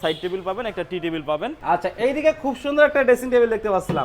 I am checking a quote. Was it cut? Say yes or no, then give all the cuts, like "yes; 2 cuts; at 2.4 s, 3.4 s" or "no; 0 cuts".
yes; 1 cut; at 1.6 s